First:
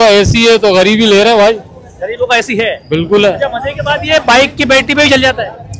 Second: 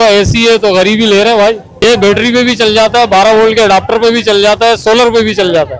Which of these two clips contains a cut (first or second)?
second